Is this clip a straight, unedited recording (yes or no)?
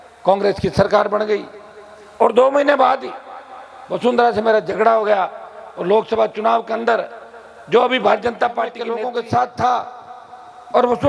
no